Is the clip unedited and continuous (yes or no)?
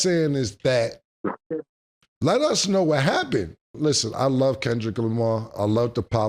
no